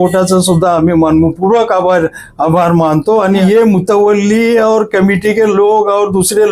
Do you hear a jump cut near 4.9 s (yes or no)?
no